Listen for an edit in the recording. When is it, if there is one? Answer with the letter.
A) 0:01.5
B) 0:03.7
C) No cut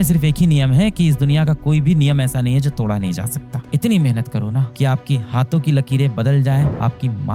B